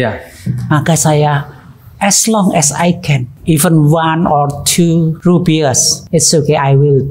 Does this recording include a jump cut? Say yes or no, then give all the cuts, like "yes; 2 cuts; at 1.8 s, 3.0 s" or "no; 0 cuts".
yes; 3 cuts; at 3.3 s, 5.2 s, 5.9 s